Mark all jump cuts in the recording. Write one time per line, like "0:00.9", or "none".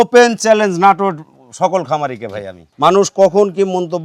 0:02.7